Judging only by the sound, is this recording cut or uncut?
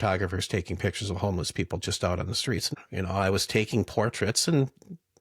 cut